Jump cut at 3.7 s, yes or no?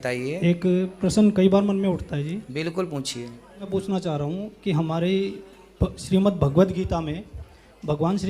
yes